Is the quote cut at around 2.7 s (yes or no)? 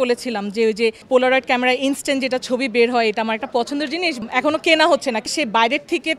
no